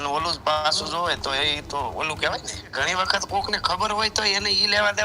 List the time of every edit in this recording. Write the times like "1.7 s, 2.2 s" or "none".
2.7 s